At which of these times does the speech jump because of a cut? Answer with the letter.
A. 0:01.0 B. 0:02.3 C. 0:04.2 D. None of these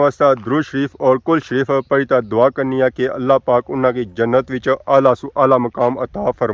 D